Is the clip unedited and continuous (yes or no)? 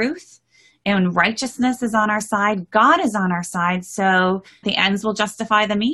no